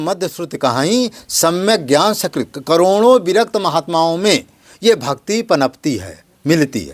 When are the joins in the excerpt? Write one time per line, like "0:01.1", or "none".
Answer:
none